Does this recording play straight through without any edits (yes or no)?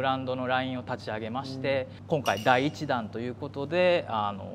yes